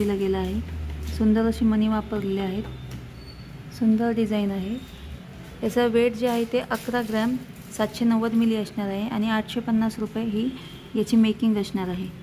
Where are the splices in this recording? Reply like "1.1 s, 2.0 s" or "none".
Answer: none